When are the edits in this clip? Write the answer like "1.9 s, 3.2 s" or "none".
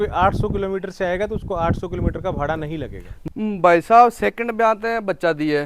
3.1 s